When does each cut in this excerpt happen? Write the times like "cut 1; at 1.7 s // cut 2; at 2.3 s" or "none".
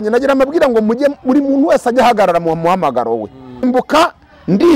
cut 1; at 3.6 s